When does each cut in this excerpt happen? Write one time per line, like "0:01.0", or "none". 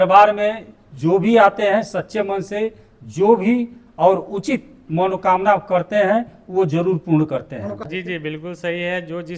0:07.8